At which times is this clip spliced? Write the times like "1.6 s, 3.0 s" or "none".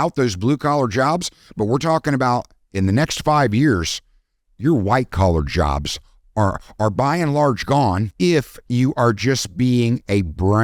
none